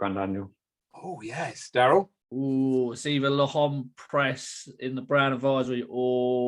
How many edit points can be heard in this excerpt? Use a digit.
1